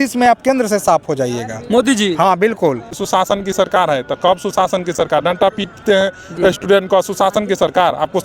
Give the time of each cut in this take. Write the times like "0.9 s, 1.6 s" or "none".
2.9 s